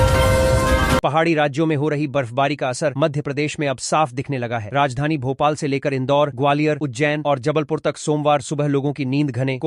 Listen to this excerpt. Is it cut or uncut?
cut